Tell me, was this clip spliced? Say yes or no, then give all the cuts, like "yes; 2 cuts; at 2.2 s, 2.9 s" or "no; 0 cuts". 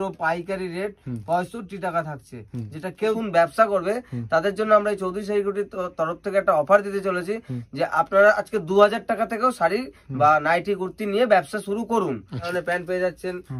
yes; 2 cuts; at 3.2 s, 12.5 s